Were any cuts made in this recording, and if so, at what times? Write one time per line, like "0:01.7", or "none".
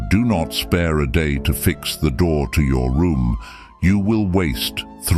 none